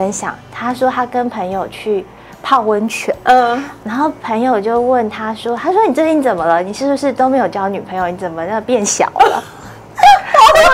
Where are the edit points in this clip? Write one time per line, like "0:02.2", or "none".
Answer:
none